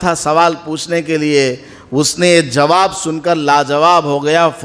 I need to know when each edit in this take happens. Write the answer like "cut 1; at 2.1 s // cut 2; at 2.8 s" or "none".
none